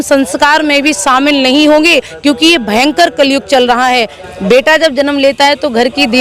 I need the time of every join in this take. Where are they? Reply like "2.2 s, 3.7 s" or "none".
4.1 s